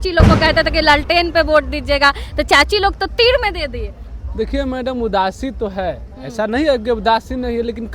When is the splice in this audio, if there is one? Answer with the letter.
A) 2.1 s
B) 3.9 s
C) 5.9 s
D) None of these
D